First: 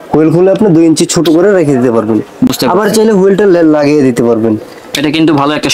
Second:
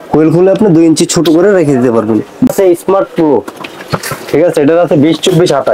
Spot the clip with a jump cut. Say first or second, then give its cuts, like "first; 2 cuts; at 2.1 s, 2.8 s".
second; 1 cut; at 2.5 s